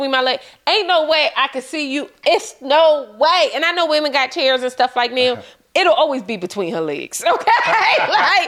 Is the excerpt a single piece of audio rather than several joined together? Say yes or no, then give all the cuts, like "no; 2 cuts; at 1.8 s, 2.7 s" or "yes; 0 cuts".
yes; 0 cuts